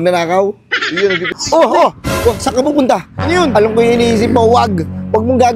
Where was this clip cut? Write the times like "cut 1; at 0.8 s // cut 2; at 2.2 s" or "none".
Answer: cut 1; at 1.4 s